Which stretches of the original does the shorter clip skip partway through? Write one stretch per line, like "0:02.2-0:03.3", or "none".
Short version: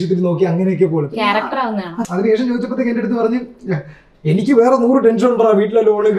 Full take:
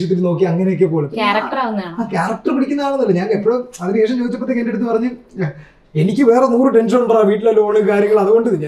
0:02.0-0:03.7

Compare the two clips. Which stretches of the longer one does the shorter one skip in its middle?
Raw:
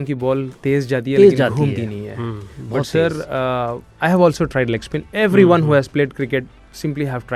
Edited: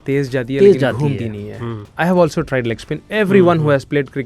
0:02.4-0:03.9

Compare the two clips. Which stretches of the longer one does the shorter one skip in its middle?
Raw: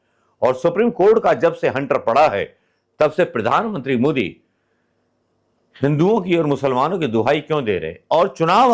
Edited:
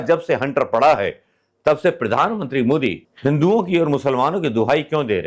0:04.4-0:05.6

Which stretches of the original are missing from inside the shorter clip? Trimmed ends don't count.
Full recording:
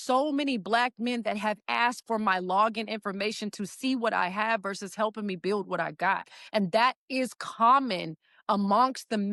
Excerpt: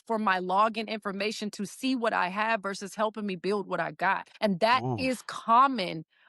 0:06.3-0:06.4

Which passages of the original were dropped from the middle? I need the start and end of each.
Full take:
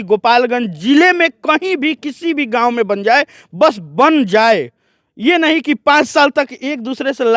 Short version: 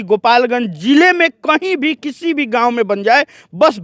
none

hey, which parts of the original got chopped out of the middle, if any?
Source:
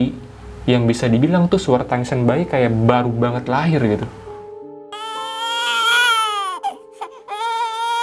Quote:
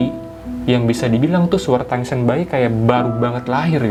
none

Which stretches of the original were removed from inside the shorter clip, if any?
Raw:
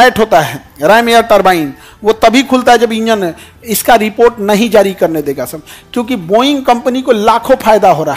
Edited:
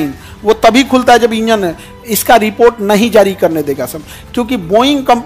none

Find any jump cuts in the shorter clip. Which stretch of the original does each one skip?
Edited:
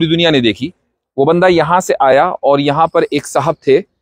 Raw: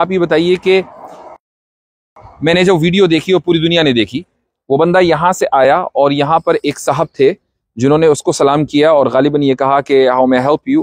none

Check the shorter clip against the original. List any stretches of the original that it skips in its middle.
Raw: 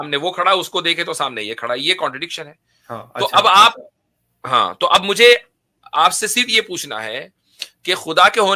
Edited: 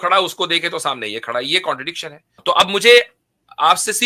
0:02.7-0:04.7

